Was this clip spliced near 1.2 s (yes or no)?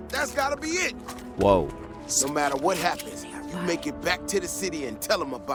no